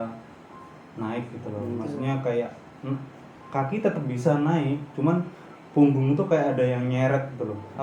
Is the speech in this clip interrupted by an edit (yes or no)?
no